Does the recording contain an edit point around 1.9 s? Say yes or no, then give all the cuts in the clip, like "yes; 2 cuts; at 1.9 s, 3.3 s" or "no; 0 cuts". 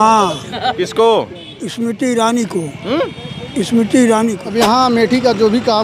no; 1 cut; at 4.4 s